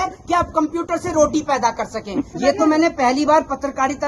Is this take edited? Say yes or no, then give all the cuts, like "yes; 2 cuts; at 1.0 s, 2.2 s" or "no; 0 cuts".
yes; 1 cut; at 2.3 s